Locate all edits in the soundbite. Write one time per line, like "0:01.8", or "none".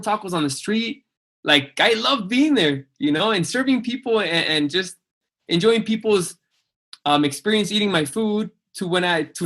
0:05.2

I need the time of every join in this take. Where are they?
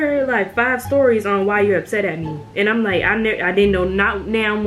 none

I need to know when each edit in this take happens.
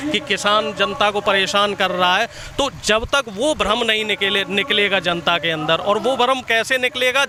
none

